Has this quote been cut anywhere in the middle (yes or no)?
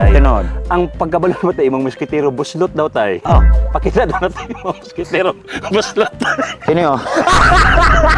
no